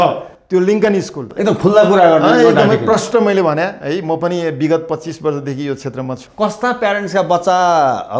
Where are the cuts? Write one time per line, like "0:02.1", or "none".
0:01.1
0:06.2